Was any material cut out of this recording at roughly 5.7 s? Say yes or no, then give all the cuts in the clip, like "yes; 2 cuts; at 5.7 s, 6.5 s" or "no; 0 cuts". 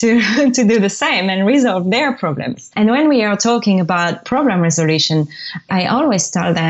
yes; 3 cuts; at 2.7 s, 4.2 s, 5.7 s